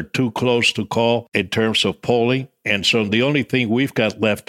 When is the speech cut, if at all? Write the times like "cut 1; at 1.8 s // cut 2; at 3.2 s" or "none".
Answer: cut 1; at 1.3 s